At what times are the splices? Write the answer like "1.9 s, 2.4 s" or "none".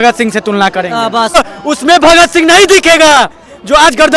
1.4 s